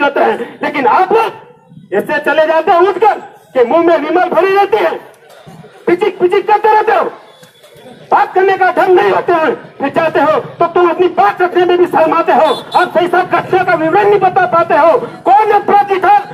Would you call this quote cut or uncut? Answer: uncut